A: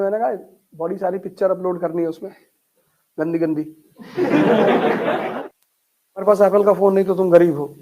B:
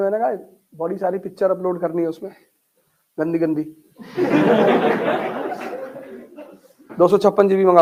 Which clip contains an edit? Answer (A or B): A